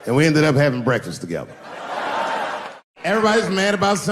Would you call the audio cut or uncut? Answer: cut